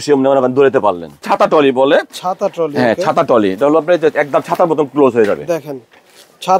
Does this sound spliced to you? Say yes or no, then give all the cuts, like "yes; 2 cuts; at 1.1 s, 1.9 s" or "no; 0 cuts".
yes; 1 cut; at 1.2 s